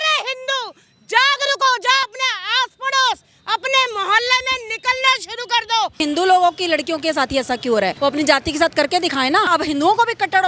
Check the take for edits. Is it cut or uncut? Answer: cut